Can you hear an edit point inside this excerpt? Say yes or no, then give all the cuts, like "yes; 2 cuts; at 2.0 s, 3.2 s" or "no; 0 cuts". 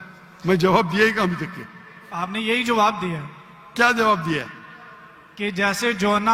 no; 0 cuts